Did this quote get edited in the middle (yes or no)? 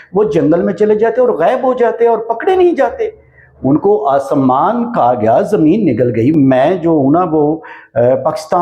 yes